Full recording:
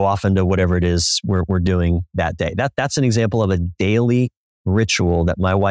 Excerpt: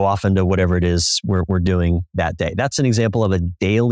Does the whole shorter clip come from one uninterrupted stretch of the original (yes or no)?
no